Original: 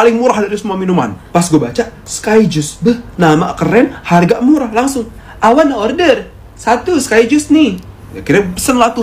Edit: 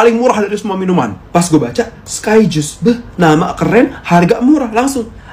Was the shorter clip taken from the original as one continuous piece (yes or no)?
yes